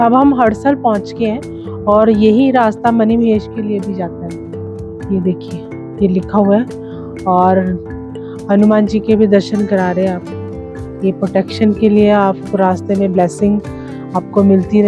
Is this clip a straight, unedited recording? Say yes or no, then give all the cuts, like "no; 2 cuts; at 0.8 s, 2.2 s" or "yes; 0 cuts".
yes; 0 cuts